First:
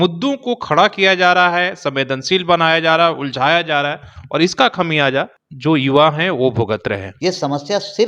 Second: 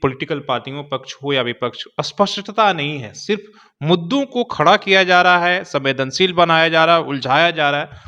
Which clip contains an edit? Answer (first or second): first